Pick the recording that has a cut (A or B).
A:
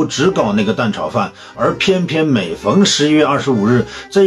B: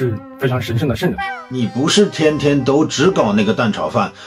B